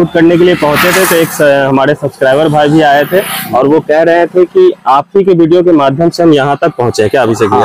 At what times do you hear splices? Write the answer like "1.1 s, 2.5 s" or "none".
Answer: none